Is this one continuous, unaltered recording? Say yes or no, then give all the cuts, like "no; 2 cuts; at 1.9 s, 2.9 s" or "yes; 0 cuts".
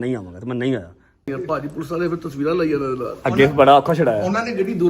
no; 1 cut; at 1.3 s